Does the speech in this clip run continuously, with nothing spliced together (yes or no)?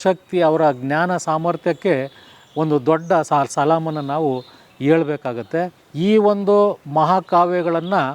no